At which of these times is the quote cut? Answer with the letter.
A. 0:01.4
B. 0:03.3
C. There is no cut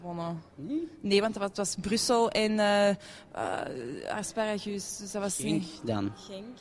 A